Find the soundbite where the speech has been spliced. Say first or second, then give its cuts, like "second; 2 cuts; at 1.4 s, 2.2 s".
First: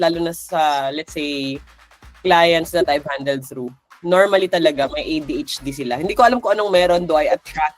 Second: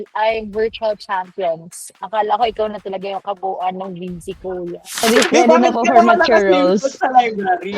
second; 1 cut; at 5.0 s